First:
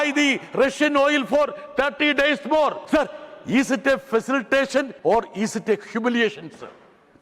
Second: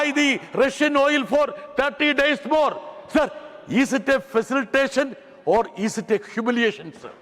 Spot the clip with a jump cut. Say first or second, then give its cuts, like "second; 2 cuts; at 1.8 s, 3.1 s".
first; 2 cuts; at 2.8 s, 4.9 s